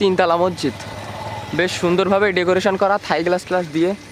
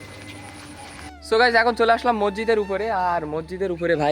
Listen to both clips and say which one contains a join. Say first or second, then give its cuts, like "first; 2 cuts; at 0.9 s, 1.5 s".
second; 1 cut; at 1.0 s